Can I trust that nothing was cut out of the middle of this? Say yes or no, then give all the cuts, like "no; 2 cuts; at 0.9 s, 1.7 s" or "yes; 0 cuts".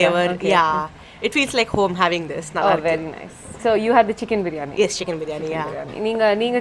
yes; 0 cuts